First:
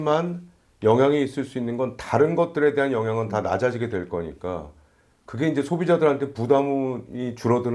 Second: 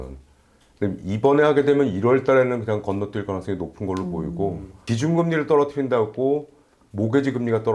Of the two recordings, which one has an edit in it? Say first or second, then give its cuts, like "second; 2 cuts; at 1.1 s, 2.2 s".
second; 1 cut; at 4.9 s